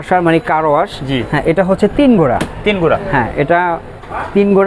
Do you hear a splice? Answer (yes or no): no